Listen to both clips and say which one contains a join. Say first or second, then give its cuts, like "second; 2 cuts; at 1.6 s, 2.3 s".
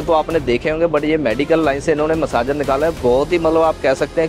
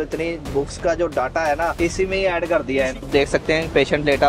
second; 2 cuts; at 1.7 s, 3.1 s